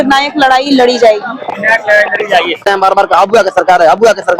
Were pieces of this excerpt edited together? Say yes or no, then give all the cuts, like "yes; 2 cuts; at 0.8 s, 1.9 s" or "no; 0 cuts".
yes; 1 cut; at 2.6 s